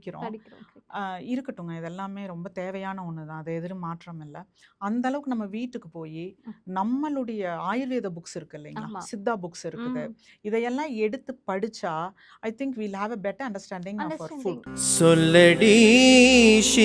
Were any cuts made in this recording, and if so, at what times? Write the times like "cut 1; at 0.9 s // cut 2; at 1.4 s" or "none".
cut 1; at 14.6 s

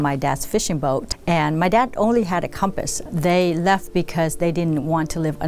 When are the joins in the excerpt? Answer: cut 1; at 1.1 s // cut 2; at 3.0 s

